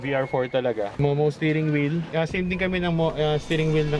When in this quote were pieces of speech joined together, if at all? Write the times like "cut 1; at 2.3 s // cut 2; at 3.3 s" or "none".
cut 1; at 0.9 s // cut 2; at 2.1 s